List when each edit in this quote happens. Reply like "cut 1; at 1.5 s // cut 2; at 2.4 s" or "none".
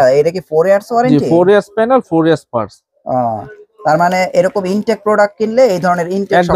none